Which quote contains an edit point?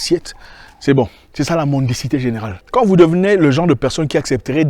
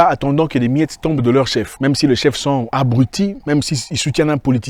first; 1 cut; at 2.5 s

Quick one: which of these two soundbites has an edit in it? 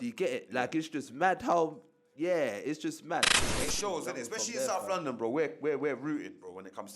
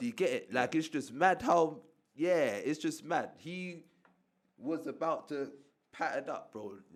first; 1 cut; at 3.4 s

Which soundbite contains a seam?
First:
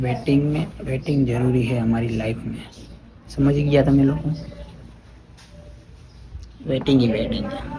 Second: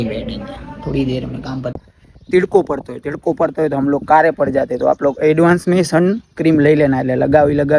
second; 1 cut; at 1.8 s

